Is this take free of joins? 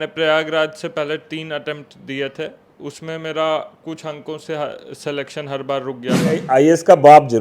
no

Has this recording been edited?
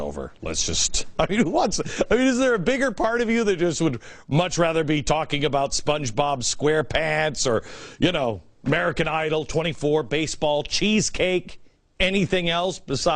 yes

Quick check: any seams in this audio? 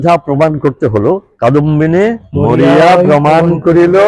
yes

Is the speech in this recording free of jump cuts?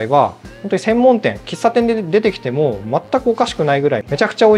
yes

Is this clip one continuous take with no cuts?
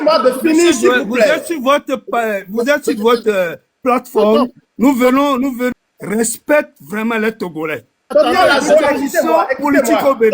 no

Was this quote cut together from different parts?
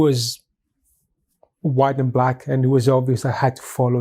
no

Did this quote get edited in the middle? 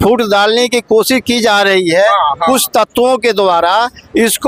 no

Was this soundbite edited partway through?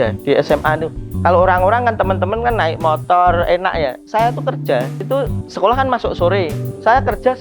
yes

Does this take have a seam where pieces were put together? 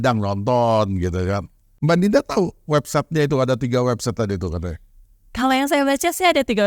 yes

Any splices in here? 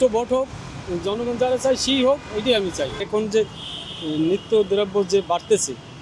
yes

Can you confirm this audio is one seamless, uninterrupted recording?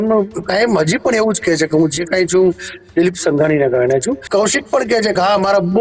no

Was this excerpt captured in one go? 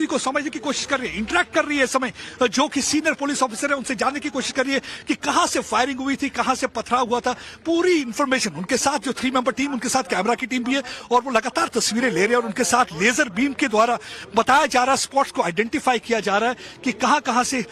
yes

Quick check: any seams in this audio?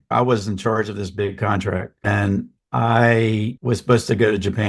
yes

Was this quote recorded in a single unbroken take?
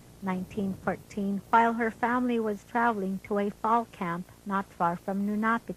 no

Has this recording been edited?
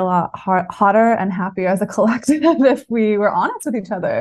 no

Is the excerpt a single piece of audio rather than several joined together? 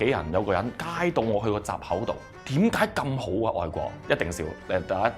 no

